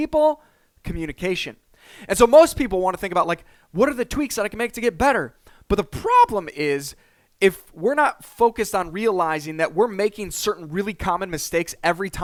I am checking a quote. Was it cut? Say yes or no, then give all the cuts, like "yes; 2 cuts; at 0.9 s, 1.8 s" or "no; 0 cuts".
no; 0 cuts